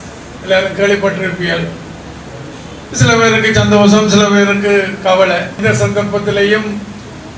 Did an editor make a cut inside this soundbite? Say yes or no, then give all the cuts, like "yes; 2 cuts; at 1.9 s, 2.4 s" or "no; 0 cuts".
yes; 1 cut; at 5.6 s